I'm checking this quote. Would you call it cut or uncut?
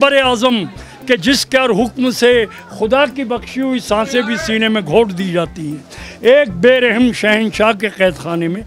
uncut